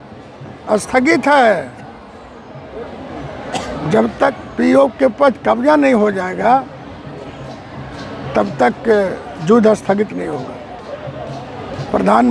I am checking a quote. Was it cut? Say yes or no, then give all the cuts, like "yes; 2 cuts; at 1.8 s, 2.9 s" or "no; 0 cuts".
no; 0 cuts